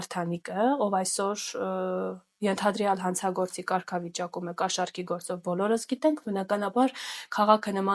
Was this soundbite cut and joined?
no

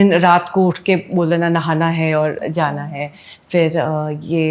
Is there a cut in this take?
no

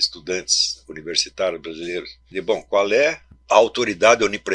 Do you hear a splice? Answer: yes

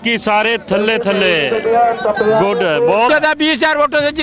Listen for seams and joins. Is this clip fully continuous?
no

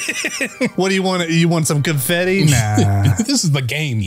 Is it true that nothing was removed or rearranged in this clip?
no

